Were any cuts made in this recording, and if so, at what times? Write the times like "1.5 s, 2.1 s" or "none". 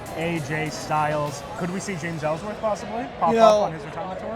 1.6 s